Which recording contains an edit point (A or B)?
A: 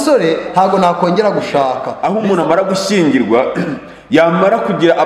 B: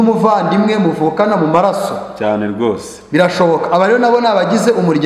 A